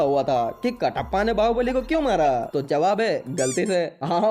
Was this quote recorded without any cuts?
no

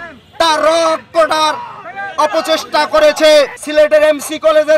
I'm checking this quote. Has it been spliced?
yes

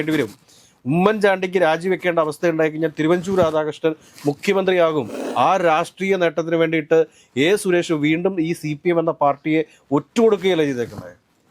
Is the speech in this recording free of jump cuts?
no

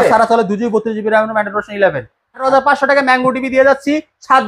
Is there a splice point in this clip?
yes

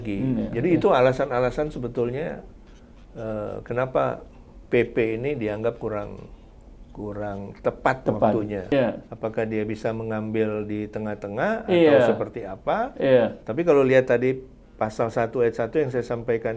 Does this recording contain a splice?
yes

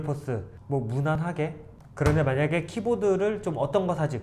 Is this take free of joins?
no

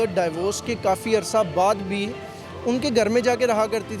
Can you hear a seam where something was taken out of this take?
no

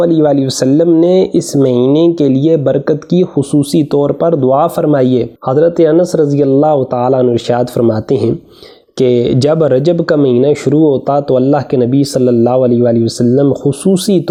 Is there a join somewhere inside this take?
no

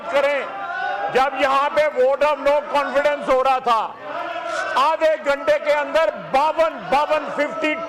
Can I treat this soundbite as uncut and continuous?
yes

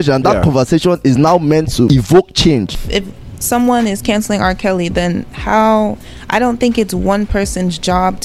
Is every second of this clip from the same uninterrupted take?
no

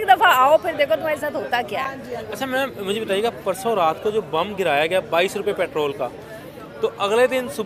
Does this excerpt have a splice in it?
no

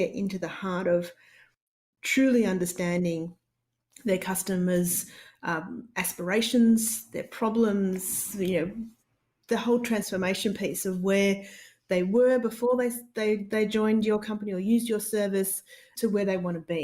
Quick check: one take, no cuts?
no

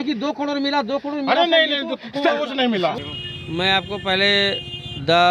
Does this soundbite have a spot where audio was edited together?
yes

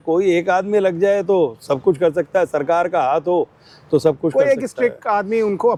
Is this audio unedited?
yes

